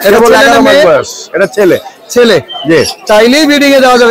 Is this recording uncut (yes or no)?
yes